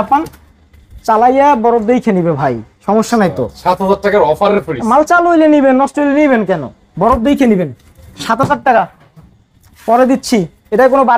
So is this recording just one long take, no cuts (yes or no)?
yes